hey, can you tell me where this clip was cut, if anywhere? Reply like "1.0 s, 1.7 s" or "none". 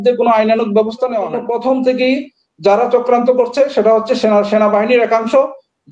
1.3 s